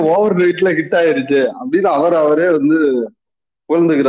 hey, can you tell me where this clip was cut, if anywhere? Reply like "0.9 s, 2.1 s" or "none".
none